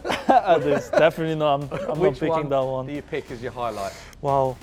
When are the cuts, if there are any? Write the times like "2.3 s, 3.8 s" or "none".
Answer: none